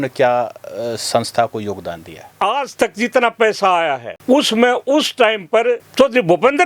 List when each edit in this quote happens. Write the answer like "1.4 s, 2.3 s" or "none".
2.3 s